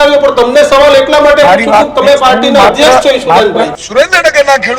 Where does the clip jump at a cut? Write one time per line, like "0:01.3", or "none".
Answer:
0:03.8